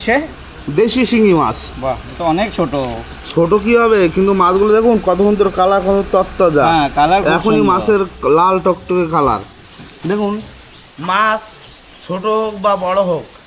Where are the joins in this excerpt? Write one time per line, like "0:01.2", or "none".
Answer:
none